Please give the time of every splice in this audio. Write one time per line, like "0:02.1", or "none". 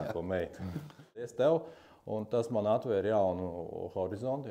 0:01.3